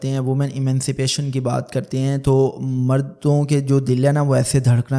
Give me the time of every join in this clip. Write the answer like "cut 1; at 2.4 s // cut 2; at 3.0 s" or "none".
none

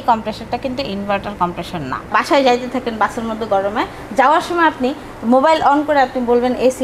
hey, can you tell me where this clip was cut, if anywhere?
cut 1; at 2.1 s

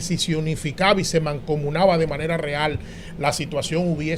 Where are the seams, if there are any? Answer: none

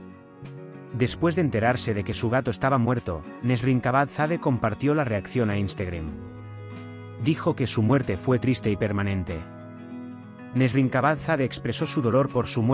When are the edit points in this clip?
none

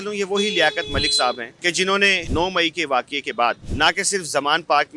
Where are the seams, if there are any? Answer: cut 1; at 2.2 s

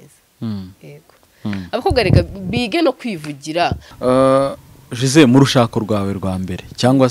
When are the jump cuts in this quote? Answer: cut 1; at 3.9 s

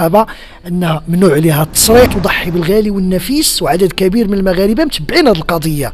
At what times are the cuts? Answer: cut 1; at 2.1 s

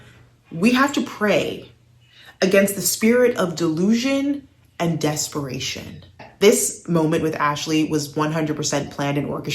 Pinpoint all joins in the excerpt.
cut 1; at 6.2 s

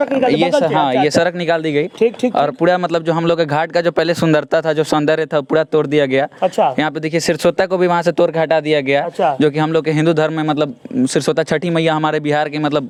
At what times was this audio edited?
none

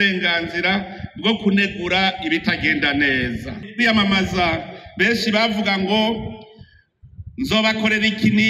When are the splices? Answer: cut 1; at 3.6 s

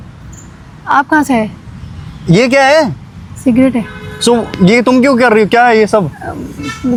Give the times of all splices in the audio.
none

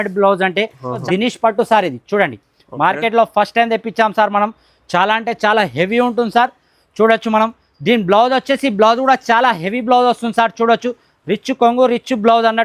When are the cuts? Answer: cut 1; at 1.0 s

